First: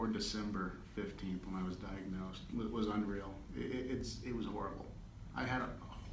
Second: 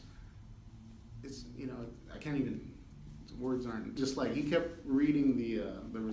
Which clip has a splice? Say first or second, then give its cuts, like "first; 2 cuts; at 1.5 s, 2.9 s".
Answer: second; 1 cut; at 4.0 s